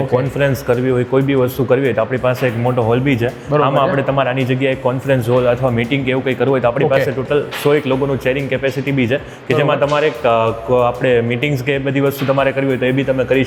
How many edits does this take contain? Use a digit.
0